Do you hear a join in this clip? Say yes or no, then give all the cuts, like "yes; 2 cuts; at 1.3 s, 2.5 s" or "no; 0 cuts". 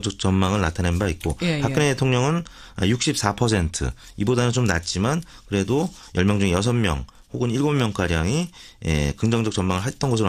no; 0 cuts